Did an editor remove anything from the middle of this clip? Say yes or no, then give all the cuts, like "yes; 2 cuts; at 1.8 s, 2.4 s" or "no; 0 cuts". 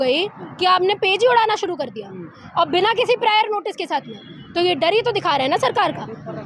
no; 0 cuts